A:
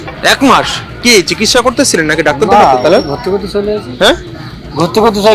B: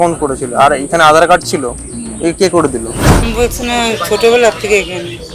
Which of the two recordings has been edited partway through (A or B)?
B